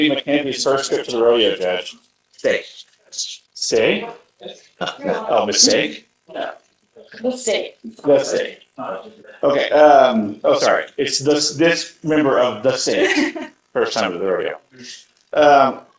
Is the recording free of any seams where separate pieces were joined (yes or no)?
yes